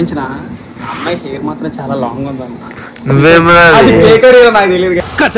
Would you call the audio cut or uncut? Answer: uncut